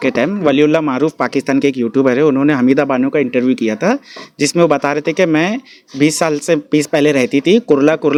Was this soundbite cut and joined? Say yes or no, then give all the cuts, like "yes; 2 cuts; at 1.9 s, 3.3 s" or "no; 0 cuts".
no; 0 cuts